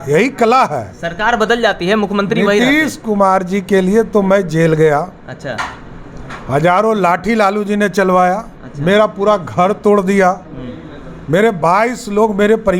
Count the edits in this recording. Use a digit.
0